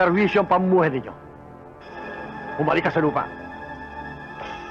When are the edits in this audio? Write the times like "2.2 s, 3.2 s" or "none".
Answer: none